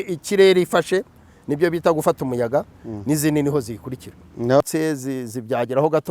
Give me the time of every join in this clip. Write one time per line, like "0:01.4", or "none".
0:04.6